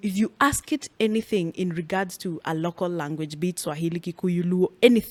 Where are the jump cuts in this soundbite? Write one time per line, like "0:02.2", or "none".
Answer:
none